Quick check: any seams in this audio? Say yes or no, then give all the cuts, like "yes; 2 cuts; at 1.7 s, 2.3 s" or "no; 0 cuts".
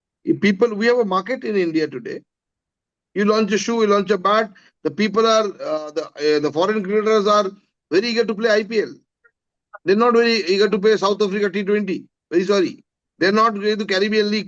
no; 0 cuts